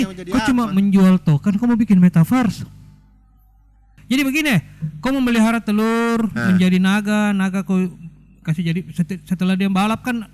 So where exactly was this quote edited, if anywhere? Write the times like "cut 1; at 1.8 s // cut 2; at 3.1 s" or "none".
cut 1; at 3.9 s